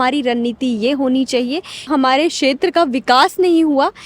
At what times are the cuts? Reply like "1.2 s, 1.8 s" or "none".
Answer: 1.9 s